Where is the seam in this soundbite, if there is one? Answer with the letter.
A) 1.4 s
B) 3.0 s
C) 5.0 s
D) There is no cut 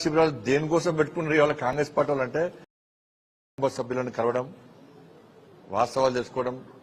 B